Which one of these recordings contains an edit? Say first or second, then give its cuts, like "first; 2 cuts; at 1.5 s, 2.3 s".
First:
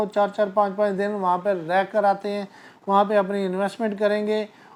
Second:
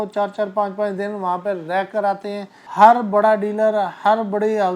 second; 1 cut; at 2.6 s